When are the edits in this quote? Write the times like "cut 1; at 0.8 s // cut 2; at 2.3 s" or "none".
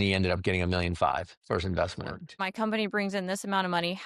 cut 1; at 2.4 s